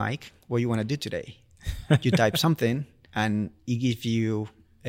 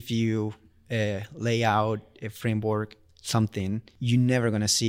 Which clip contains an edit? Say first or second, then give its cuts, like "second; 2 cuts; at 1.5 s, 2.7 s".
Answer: second; 1 cut; at 3.9 s